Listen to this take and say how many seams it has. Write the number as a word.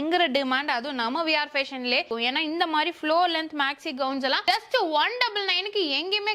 one